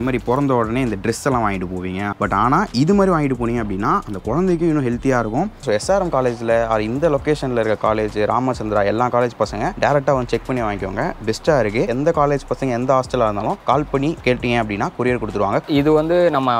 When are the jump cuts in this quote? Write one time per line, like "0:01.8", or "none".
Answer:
0:02.1
0:05.6
0:09.7
0:11.9
0:13.6
0:15.6